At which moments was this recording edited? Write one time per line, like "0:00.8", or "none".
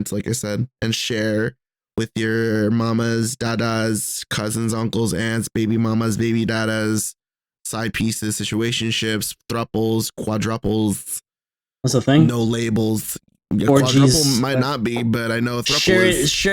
none